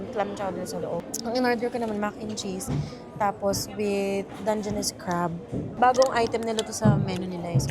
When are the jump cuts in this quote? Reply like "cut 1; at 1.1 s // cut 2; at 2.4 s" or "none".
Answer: cut 1; at 5.7 s